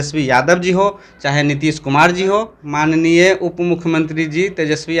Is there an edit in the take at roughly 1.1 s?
no; 1 cut; at 2.6 s

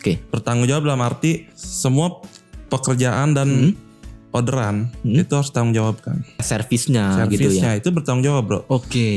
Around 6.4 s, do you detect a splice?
yes; 1 cut; at 6.4 s

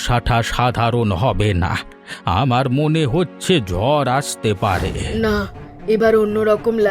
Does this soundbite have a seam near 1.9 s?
no; 1 cut; at 5.0 s

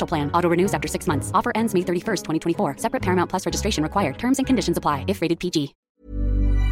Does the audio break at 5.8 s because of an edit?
yes; 1 cut; at 5.8 s

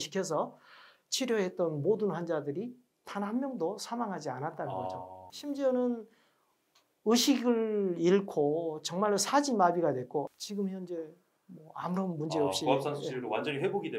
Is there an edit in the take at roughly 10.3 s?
yes; 1 cut; at 10.3 s

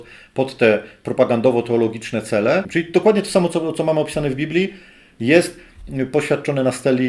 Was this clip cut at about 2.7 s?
yes; 1 cut; at 2.7 s

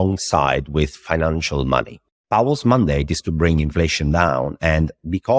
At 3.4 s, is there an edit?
no; 1 cut; at 2.0 s

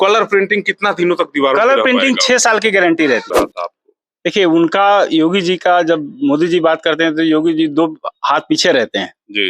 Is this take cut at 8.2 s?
no; 1 cut; at 3.3 s

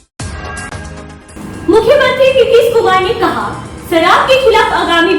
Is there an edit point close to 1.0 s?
yes; 1 cut; at 1.0 s

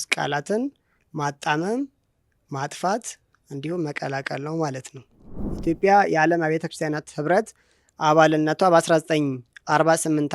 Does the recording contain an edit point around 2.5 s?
no; 1 cut; at 5.4 s

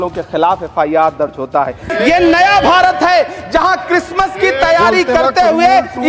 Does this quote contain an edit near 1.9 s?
yes; 1 cut; at 1.9 s

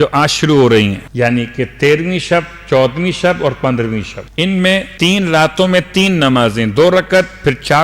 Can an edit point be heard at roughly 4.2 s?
yes; 3 cuts; at 1.0 s, 4.2 s, 4.9 s

